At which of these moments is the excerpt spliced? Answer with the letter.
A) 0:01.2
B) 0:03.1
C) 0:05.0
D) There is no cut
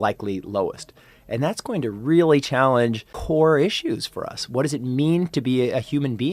B